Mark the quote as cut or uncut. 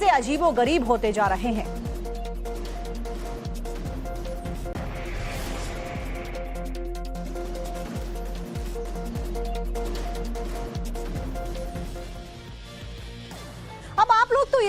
uncut